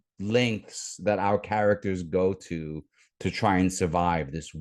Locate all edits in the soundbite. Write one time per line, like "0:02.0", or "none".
none